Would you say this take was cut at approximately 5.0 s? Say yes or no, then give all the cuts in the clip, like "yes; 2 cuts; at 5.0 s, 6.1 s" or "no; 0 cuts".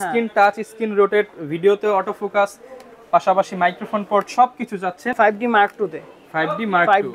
yes; 1 cut; at 5.0 s